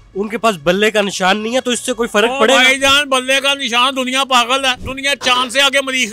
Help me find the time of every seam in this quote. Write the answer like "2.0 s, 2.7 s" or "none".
4.9 s

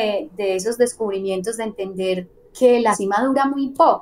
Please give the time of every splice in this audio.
3.0 s

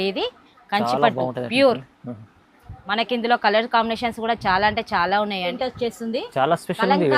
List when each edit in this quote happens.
5.5 s

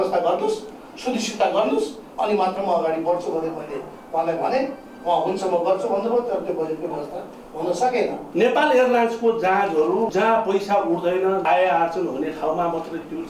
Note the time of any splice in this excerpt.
8.2 s, 10.1 s, 11.4 s

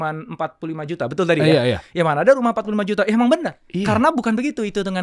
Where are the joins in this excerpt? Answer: 3.6 s

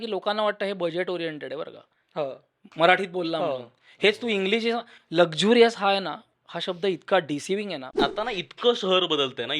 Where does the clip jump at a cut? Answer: 7.9 s

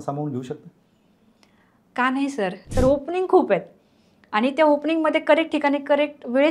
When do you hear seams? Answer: 2.7 s

